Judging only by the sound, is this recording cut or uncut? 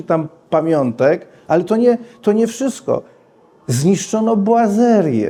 uncut